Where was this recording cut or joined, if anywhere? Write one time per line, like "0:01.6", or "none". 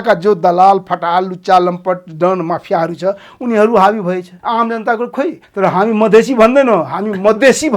0:04.3
0:05.4